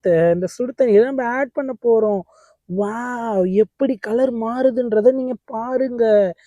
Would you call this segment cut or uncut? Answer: uncut